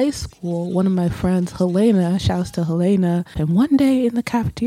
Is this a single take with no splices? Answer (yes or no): no